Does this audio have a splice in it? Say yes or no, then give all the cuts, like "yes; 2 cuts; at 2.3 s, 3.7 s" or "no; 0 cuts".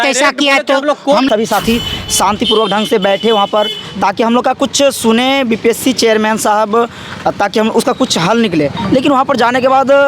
yes; 1 cut; at 1.3 s